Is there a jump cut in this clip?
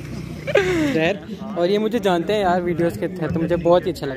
yes; 1 cut; at 0.9 s

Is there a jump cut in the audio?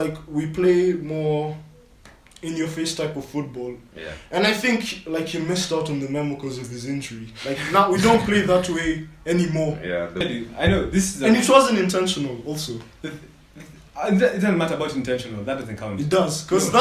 yes; 1 cut; at 10.2 s

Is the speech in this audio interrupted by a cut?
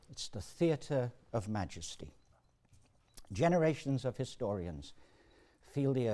no; 0 cuts

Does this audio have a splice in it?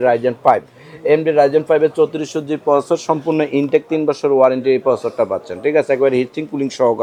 no; 0 cuts

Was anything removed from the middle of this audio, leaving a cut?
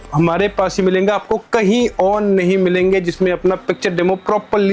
no; 0 cuts

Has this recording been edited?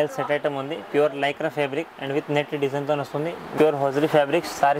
yes; 1 cut; at 3.5 s

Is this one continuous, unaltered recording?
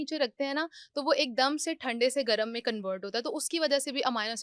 yes; 0 cuts

